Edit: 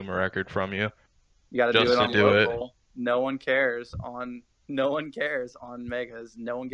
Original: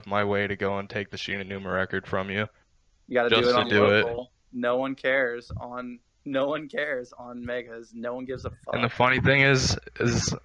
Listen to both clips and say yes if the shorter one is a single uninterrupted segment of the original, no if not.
yes